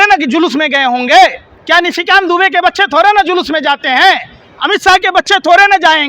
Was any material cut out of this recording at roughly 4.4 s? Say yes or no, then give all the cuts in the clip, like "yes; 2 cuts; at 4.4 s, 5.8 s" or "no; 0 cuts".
no; 1 cut; at 1.5 s